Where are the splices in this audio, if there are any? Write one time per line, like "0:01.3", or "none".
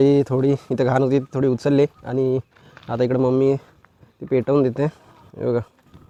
none